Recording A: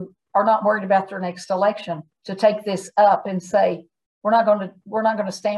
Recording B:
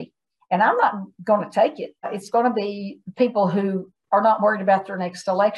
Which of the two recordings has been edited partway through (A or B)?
B